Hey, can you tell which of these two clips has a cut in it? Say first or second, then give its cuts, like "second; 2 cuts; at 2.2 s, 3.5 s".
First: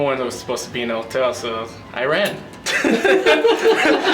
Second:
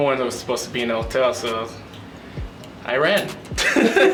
first; 1 cut; at 1.8 s